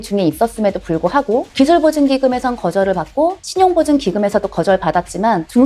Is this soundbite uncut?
yes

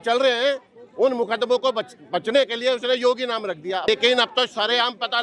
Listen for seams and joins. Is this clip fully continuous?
no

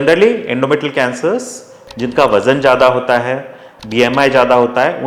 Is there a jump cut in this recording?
yes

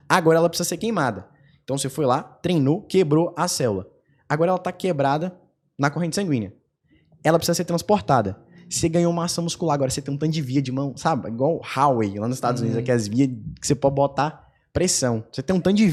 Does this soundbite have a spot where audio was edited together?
no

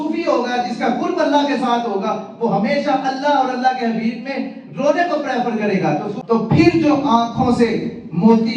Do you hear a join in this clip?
yes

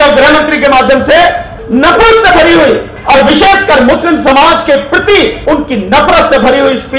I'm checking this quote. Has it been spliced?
yes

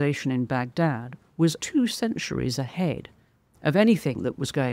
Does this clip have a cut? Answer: yes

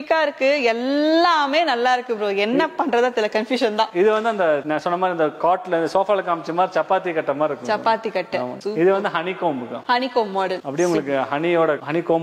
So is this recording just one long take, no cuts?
yes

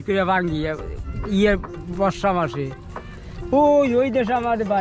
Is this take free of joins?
yes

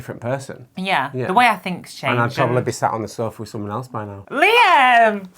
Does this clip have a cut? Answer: yes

